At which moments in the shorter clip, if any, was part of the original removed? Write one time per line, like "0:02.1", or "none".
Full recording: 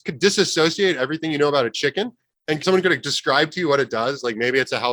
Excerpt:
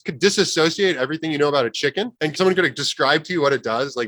0:02.1